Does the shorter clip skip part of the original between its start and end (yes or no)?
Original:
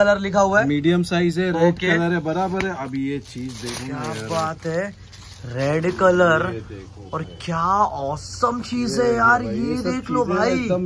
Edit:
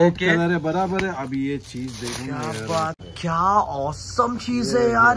yes